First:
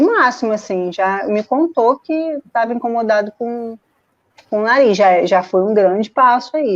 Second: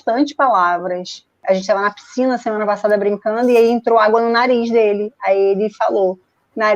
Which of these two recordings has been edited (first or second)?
second